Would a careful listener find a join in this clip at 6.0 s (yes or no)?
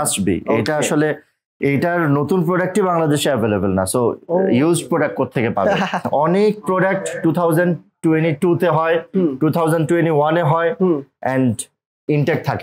yes